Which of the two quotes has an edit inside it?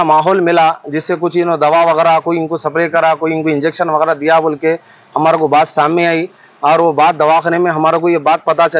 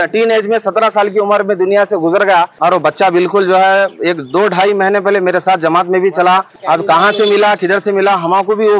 second; 2 cuts; at 2.5 s, 6.5 s

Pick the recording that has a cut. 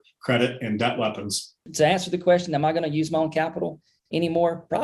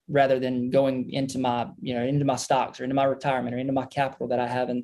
first; 1 cut; at 1.7 s

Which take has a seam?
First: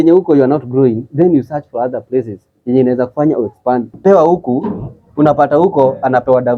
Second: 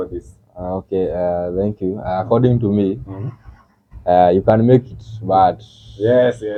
first; 1 cut; at 4.0 s

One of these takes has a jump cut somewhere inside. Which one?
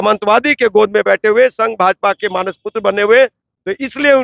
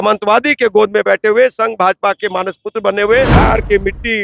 second; 1 cut; at 3.3 s

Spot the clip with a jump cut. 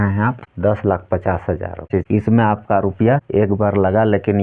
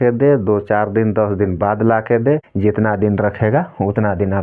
first; 1 cut; at 1.9 s

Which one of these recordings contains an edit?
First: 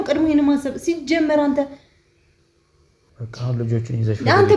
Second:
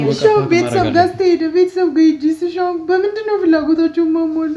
first; 1 cut; at 3.1 s

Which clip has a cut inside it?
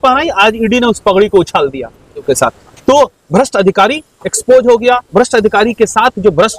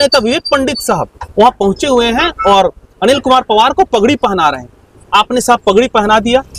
first; 1 cut; at 2.2 s

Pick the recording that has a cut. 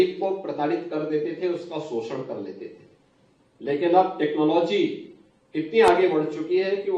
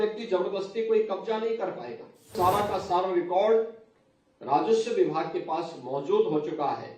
second; 1 cut; at 2.3 s

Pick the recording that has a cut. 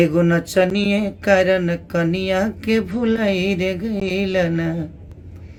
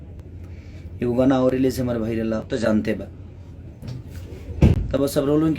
second; 1 cut; at 2.5 s

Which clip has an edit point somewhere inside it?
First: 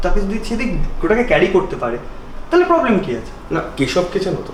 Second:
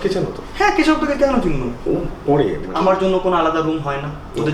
second; 1 cut; at 2.6 s

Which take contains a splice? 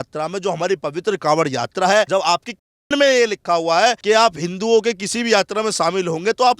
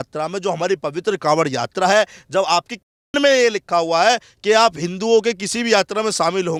first; 2 cuts; at 2.1 s, 4.0 s

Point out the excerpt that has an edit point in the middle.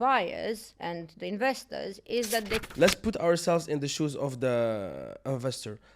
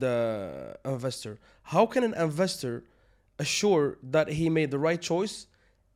first; 1 cut; at 2.7 s

